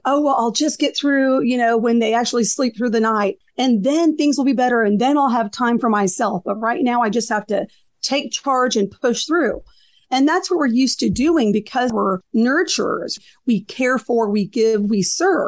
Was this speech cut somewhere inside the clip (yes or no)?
yes